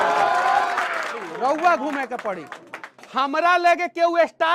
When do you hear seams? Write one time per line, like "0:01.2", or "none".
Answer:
0:01.3